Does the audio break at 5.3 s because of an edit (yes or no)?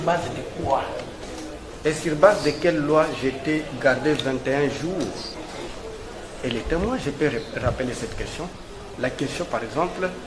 yes